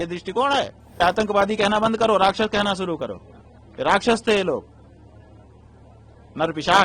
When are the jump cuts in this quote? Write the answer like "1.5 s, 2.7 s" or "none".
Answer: 1.0 s